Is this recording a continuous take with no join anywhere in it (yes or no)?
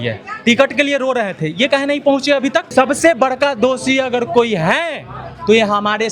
no